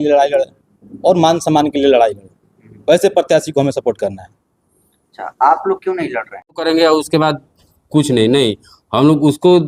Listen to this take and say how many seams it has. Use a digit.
1